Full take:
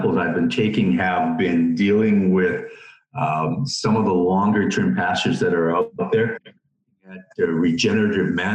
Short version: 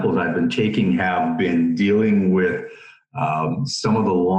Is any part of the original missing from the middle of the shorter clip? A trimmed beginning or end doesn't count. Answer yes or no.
no